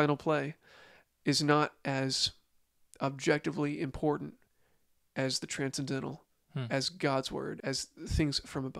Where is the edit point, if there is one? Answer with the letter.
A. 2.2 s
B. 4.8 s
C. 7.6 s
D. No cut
C